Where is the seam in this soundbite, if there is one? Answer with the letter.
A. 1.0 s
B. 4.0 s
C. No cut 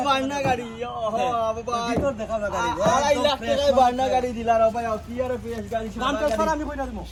C